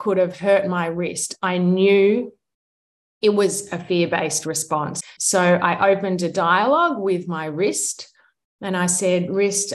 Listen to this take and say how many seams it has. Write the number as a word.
one